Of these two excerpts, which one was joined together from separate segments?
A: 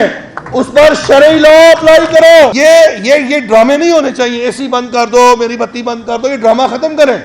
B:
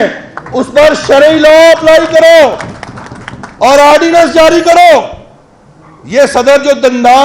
A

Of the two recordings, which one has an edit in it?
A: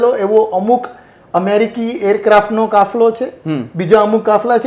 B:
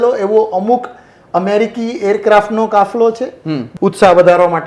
B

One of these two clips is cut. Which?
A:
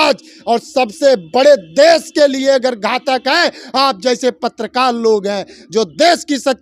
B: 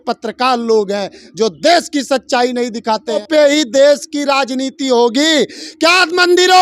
B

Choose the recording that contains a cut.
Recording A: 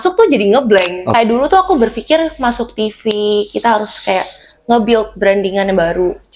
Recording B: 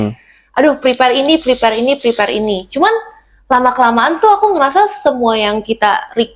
A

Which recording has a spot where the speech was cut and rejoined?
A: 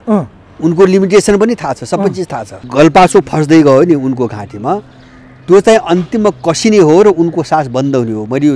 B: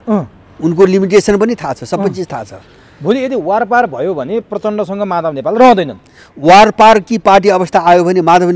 A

